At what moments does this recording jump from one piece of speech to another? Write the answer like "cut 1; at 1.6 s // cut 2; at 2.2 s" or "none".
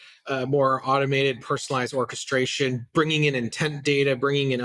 none